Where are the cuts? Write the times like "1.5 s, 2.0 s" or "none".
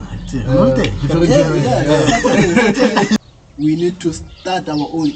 3.2 s